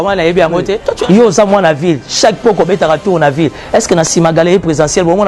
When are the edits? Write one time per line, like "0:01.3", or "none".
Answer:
0:00.9